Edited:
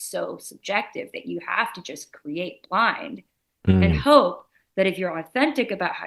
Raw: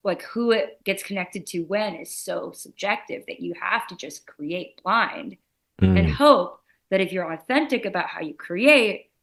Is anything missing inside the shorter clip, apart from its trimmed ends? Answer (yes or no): no